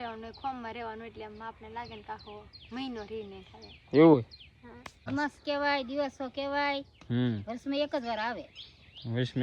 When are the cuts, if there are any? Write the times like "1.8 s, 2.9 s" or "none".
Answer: 5.1 s

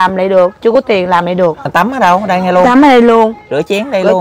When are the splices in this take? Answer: 1.7 s

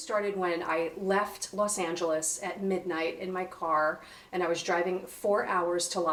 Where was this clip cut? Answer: none

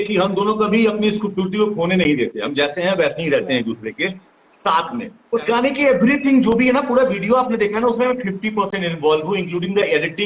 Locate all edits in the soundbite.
5.2 s

